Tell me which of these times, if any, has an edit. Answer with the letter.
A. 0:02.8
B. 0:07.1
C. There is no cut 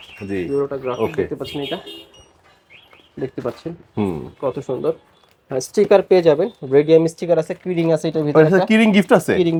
C